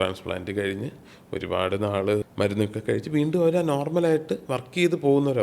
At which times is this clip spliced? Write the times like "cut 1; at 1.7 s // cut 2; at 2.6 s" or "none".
cut 1; at 2.3 s

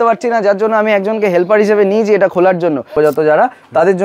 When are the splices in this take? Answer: cut 1; at 2.9 s

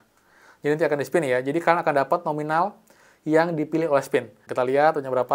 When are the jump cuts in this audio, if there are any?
cut 1; at 4.4 s

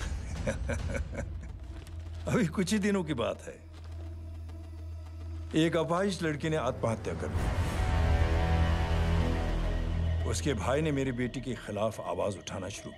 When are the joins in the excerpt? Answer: none

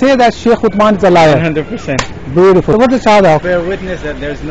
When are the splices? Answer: cut 1; at 2.7 s // cut 2; at 3.4 s

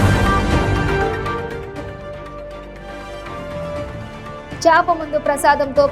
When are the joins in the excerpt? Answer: cut 1; at 3.1 s

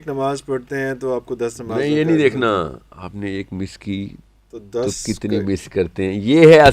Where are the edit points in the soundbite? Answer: none

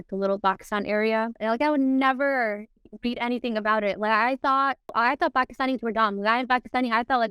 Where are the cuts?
cut 1; at 1.4 s // cut 2; at 4.9 s

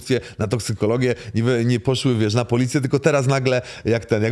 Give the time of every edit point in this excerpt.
none

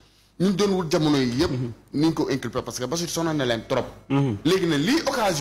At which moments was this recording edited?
none

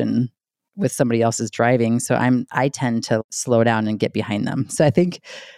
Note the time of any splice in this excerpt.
none

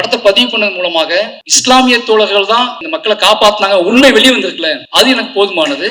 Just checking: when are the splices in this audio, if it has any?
cut 1; at 1.4 s // cut 2; at 2.9 s // cut 3; at 4.8 s

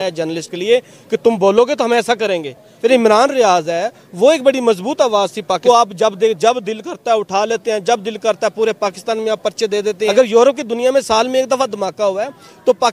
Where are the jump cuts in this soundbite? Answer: cut 1; at 2.6 s // cut 2; at 5.6 s // cut 3; at 10.1 s

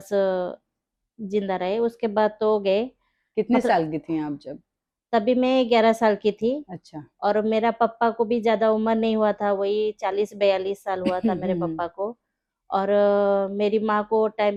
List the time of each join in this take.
none

